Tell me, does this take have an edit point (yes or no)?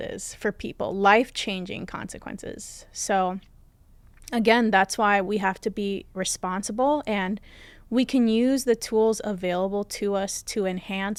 no